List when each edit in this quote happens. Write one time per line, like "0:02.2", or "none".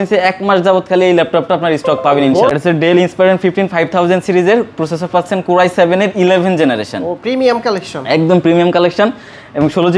0:02.5

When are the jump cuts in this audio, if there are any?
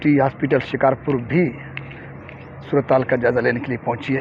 none

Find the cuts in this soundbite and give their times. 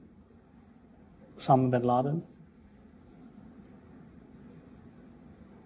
none

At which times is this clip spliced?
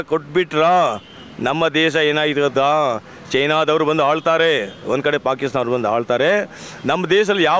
none

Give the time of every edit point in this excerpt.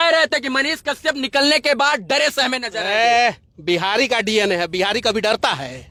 none

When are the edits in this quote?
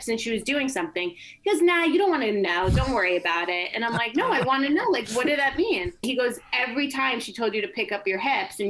0:06.0

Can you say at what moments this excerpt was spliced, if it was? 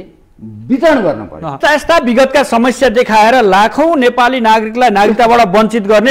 0:01.5

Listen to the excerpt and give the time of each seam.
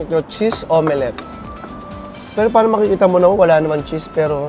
none

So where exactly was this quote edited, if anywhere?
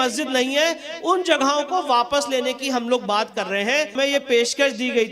0:03.9

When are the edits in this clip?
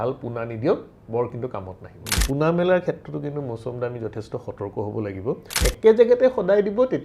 0:02.1
0:05.7

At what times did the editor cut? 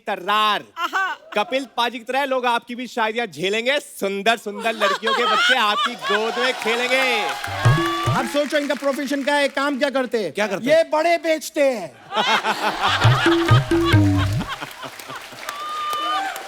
0:08.1

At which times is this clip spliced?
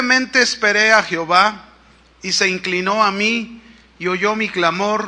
none

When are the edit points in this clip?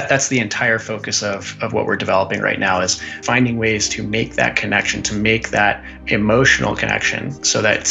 0:03.2
0:06.0

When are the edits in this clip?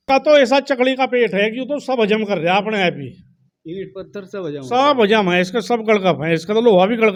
none

